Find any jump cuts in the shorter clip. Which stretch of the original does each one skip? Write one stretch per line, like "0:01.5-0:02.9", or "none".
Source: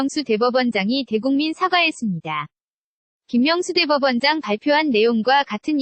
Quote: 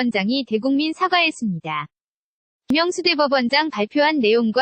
0:03.3-0:03.4